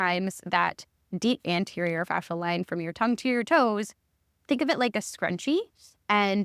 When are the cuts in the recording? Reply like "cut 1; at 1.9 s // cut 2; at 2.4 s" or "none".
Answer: cut 1; at 1.4 s // cut 2; at 4.3 s